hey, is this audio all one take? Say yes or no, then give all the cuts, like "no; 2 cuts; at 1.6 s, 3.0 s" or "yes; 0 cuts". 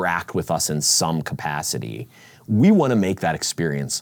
yes; 0 cuts